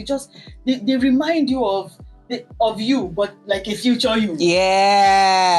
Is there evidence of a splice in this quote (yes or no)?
no